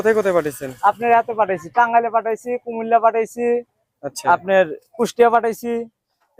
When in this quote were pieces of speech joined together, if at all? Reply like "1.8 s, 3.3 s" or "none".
none